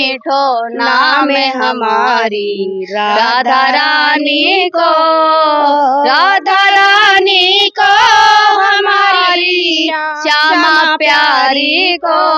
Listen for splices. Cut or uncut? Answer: uncut